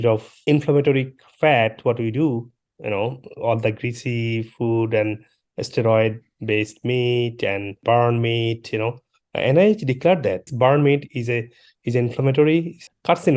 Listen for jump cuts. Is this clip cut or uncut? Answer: uncut